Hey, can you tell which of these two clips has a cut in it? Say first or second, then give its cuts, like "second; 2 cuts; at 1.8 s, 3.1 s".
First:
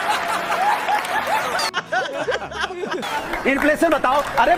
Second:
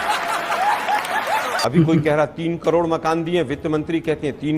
second; 1 cut; at 1.6 s